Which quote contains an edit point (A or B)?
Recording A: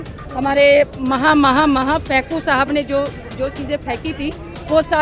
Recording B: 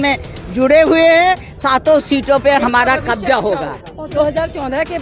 B